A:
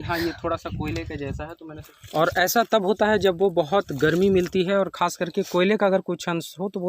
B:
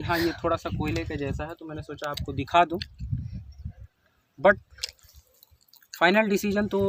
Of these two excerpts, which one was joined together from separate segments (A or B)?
A